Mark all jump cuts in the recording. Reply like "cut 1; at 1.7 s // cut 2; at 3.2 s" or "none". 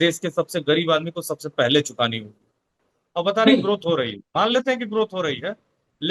cut 1; at 2.8 s

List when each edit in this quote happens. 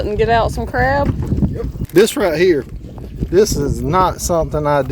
cut 1; at 1.8 s

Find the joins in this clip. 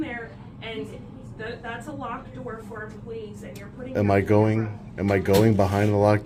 none

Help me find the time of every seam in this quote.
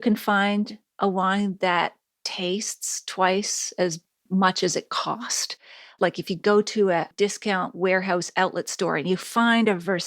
cut 1; at 5.6 s

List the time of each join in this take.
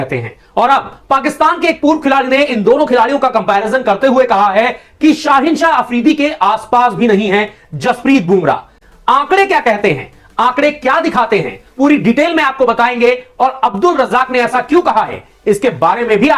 cut 1; at 8.7 s

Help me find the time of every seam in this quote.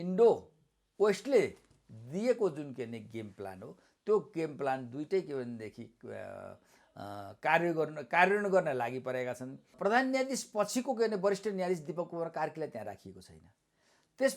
cut 1; at 9.7 s

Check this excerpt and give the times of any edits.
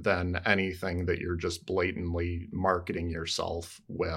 none

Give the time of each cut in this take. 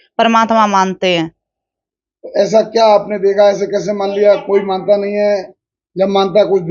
none

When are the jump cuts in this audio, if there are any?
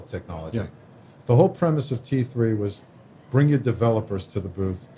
none

